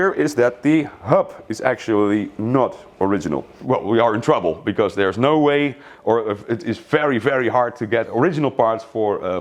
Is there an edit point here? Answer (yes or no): yes